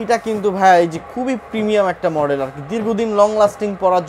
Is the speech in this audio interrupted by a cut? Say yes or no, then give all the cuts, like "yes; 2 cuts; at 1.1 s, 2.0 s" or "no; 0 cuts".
no; 0 cuts